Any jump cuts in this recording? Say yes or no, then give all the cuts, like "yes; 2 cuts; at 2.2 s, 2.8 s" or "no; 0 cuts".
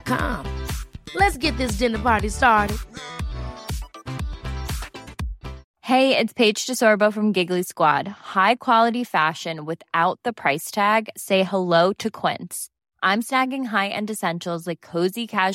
yes; 1 cut; at 5.7 s